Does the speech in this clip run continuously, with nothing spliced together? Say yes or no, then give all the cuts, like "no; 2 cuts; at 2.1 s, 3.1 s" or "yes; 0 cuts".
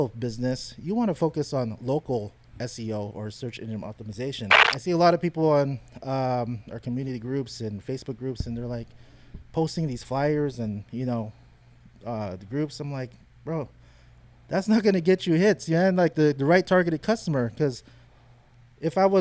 no; 1 cut; at 4.7 s